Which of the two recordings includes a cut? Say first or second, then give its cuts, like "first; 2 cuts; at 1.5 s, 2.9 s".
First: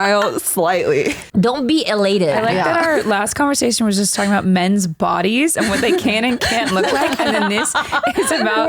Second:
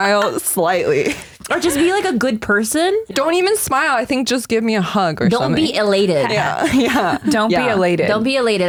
first; 2 cuts; at 1.3 s, 2.4 s